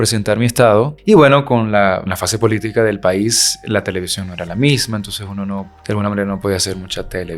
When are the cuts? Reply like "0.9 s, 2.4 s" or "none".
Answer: 0.9 s, 2.1 s, 5.7 s